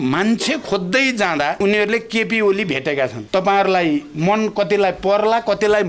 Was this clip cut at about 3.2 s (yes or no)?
yes